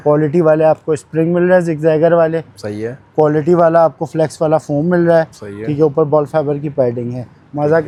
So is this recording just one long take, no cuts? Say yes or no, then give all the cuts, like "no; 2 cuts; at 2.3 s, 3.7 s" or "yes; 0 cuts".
yes; 0 cuts